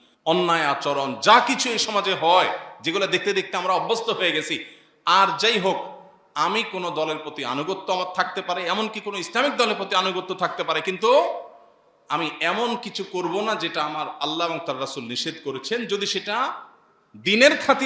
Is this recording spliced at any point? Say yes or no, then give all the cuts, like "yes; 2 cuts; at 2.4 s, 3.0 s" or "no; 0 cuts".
no; 0 cuts